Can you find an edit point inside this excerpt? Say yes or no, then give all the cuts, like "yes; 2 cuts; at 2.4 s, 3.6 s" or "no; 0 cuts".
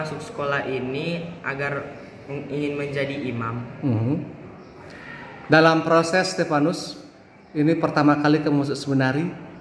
no; 0 cuts